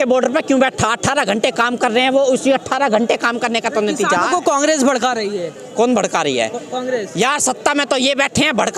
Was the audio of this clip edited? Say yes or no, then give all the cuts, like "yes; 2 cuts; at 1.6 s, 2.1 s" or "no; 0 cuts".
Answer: no; 0 cuts